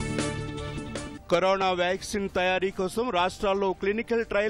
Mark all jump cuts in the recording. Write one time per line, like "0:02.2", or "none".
0:01.1